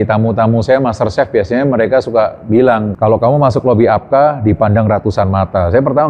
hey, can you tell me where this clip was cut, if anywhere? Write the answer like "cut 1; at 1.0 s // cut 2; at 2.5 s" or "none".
cut 1; at 2.9 s